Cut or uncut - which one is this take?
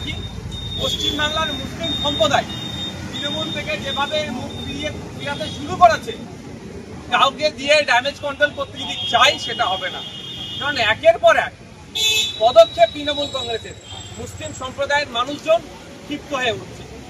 uncut